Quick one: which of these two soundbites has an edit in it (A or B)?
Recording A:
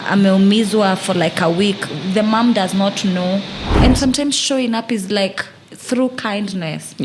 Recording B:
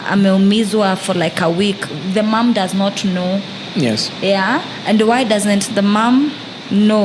A